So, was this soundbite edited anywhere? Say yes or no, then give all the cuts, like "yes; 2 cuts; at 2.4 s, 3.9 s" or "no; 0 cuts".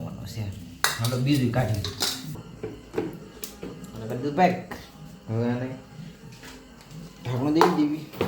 yes; 1 cut; at 2.4 s